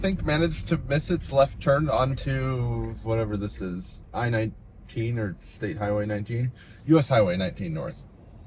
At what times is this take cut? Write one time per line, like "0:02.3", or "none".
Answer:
none

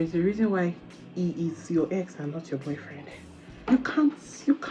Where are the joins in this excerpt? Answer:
0:03.6

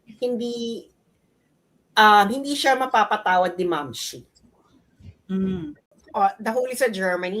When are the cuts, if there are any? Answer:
0:06.0

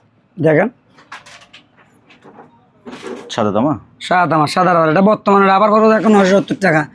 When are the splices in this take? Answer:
none

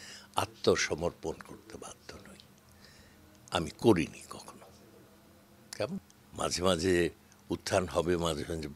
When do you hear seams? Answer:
0:06.2

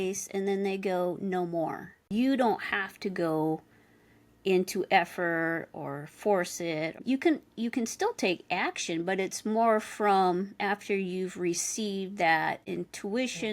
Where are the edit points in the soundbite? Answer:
0:01.9

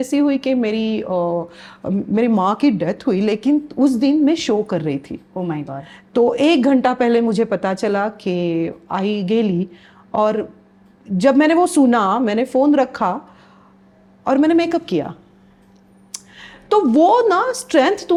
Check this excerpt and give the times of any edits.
none

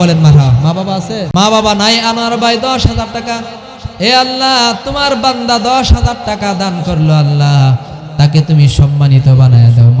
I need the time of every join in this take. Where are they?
0:01.3

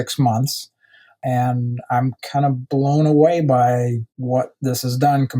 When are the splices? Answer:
0:04.1

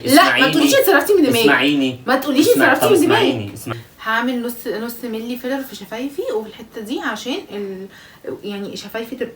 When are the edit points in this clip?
0:03.7

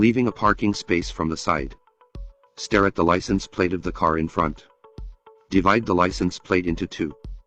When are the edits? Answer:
0:03.5

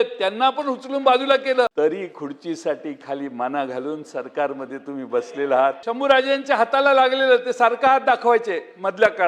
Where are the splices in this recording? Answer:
0:01.7
0:05.9

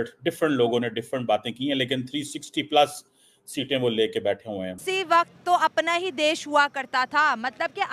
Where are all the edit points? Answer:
0:04.8

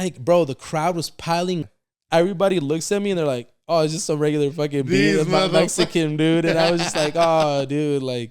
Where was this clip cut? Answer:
0:01.6

